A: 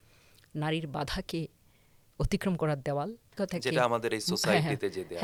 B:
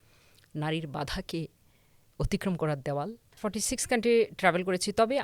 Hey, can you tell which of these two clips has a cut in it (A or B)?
B